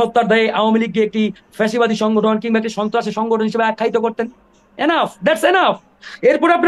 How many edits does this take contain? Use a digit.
0